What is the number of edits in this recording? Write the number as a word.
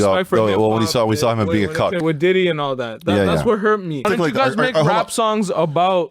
two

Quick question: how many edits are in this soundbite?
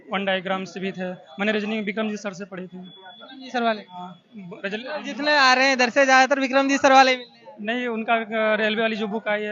zero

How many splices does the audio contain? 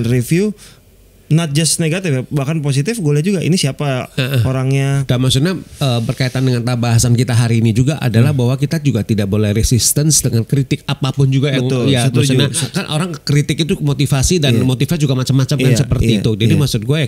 two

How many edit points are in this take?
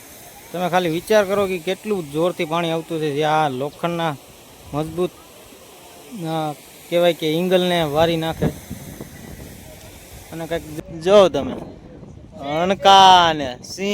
one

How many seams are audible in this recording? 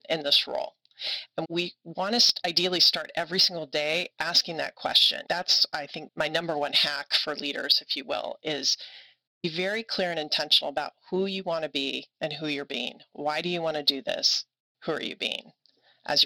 three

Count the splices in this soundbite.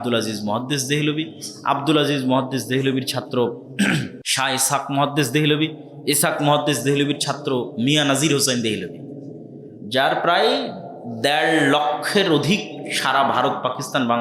one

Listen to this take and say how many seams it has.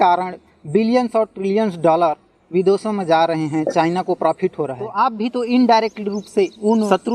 one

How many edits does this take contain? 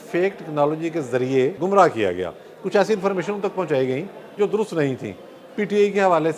one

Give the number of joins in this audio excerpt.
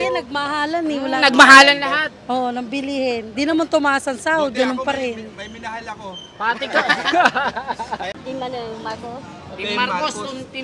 one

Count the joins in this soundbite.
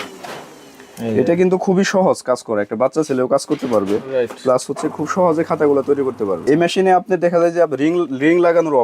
one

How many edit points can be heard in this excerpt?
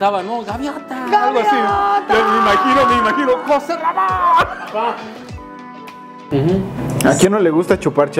one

